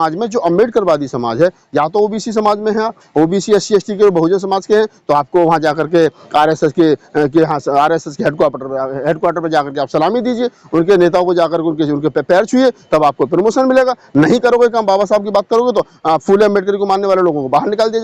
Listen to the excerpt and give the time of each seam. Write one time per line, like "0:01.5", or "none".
none